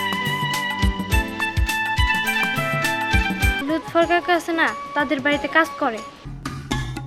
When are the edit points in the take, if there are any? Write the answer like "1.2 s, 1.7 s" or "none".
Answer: 3.6 s, 6.3 s